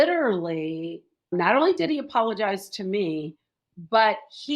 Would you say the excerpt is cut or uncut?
cut